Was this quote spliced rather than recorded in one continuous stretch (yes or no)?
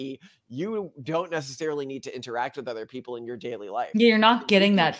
no